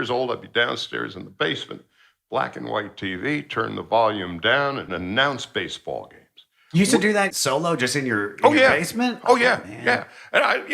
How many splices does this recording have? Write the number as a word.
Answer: two